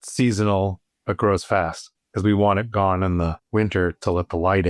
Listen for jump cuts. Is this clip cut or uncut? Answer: uncut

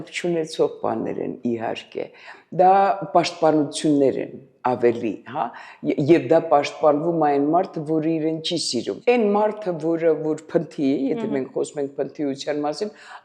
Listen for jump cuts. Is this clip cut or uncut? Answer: cut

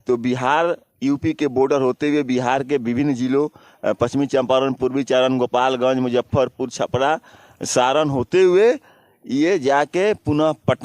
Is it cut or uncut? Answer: uncut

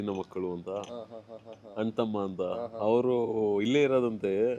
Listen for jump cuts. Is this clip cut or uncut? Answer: uncut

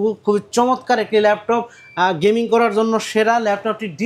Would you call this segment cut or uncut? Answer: uncut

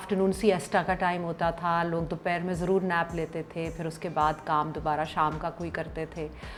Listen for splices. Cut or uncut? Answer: uncut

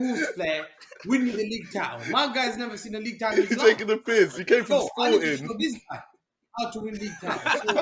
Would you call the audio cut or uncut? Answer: uncut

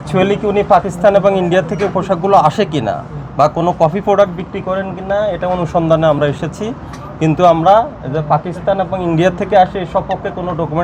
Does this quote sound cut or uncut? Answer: uncut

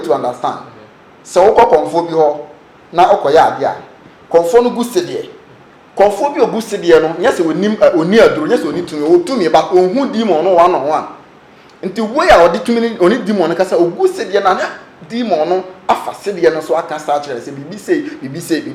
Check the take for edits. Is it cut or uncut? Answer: uncut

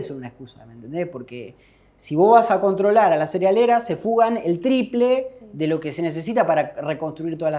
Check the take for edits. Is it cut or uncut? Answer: uncut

